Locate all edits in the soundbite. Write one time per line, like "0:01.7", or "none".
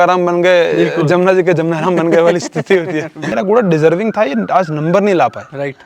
0:03.3